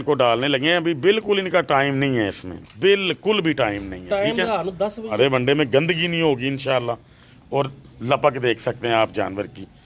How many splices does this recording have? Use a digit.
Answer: 1